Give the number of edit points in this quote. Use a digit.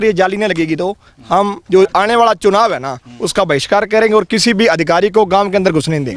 0